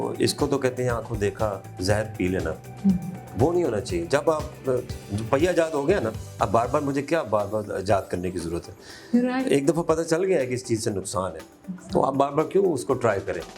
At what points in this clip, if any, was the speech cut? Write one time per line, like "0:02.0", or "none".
none